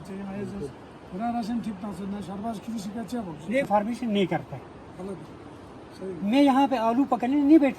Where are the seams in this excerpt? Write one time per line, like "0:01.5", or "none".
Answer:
0:03.7